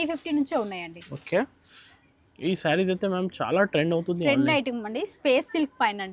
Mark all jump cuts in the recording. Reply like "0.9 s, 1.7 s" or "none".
1.7 s